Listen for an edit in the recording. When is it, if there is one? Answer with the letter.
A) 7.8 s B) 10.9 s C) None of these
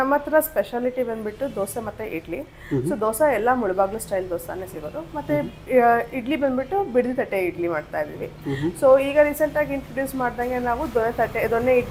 C